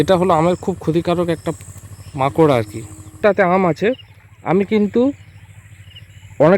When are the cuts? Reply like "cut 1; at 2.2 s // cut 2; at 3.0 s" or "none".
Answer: cut 1; at 3.2 s